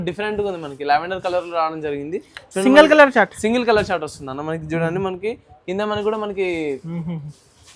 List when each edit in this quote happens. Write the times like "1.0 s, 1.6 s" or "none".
none